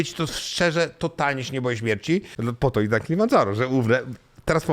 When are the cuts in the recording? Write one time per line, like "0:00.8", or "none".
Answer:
0:02.3